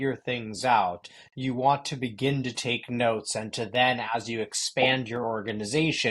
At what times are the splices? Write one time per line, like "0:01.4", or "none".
none